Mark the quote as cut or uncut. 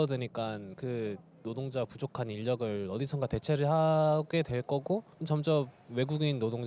uncut